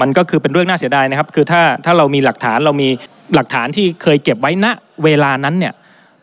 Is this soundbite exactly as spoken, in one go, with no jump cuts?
no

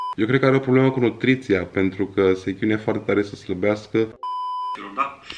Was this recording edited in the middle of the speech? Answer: yes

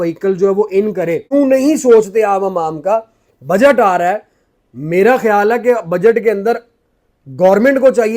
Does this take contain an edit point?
yes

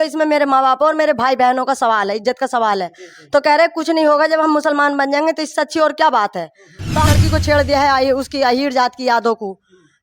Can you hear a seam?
yes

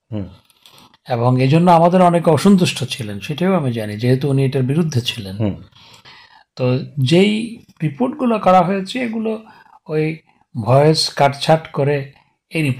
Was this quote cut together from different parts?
no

